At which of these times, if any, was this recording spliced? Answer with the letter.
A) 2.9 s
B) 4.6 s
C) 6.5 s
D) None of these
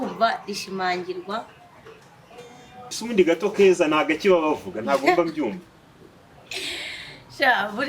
A